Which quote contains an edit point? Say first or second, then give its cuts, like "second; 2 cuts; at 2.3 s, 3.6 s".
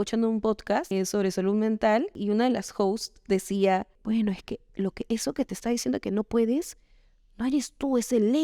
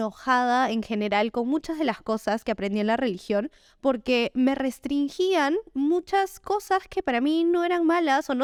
first; 3 cuts; at 0.9 s, 2.1 s, 3.9 s